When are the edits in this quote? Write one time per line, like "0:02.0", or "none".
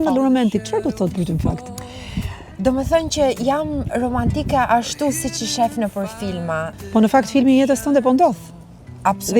0:06.7